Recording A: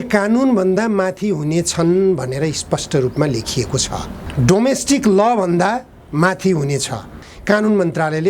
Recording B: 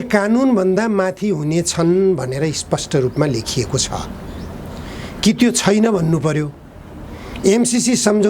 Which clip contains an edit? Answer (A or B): A